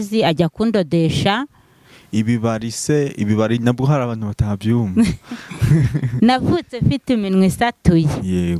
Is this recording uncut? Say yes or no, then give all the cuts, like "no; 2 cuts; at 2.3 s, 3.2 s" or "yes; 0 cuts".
yes; 0 cuts